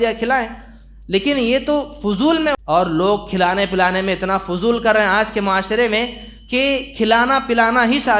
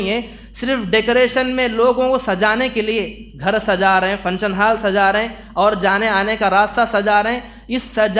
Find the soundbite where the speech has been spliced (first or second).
first